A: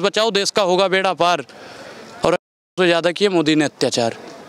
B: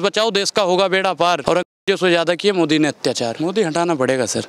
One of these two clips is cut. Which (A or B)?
B